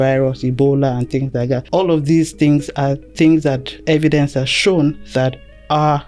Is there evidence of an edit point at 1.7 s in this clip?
yes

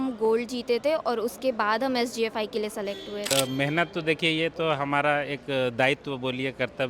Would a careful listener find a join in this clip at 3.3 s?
yes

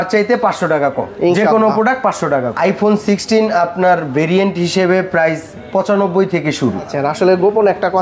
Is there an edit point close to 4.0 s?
no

